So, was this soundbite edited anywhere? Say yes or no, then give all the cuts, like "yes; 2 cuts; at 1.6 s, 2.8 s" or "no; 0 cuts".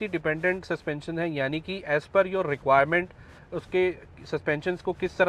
no; 0 cuts